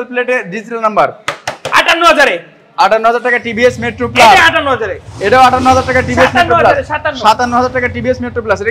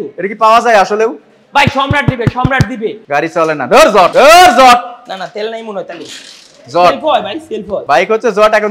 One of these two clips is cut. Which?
second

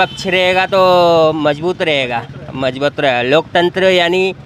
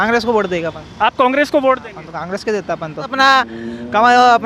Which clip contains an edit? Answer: second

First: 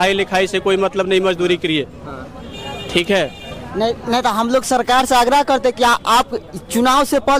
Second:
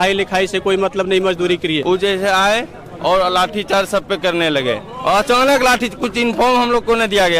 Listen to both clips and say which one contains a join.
second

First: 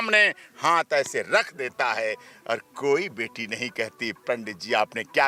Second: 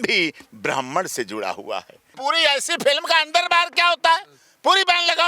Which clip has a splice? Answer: second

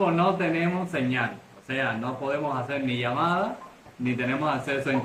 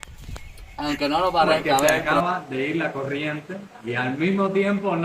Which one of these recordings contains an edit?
second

